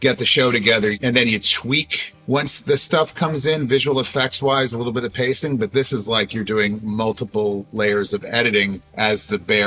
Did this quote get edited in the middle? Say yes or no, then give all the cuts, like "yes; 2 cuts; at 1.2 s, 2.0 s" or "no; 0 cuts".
no; 0 cuts